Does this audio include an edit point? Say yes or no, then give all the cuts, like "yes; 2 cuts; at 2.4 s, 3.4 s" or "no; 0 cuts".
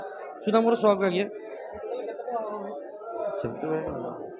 no; 0 cuts